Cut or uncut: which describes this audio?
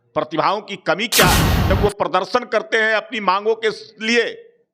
cut